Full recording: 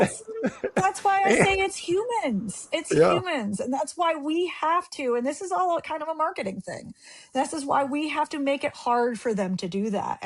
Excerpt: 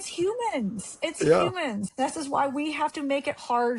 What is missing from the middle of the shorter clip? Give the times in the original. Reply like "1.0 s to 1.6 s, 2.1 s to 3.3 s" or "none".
3.6 s to 7.2 s